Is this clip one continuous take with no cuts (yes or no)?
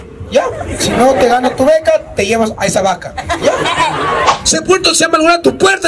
no